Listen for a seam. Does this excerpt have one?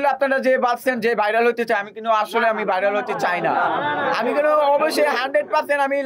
no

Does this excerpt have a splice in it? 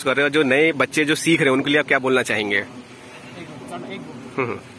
no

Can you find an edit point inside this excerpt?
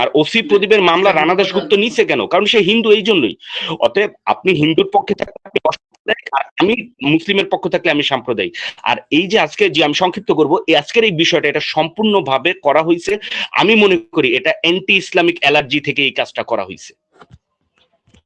no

